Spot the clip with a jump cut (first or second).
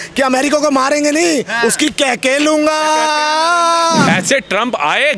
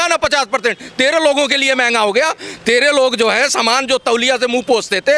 first